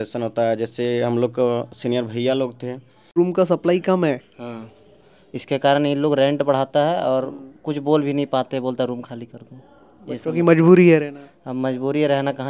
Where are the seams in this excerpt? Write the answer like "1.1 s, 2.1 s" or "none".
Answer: 3.1 s